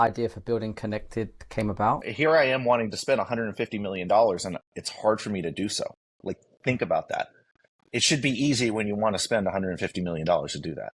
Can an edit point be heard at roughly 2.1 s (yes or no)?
yes